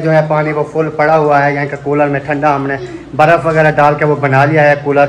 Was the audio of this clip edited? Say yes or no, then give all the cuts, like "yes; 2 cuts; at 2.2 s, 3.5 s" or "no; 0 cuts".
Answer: no; 0 cuts